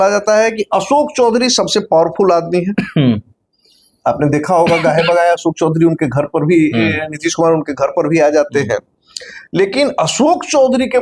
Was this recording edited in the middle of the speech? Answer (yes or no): no